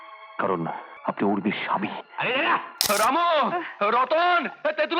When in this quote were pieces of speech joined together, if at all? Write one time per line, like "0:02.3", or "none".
0:00.9
0:02.9